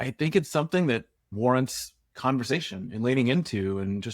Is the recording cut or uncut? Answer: cut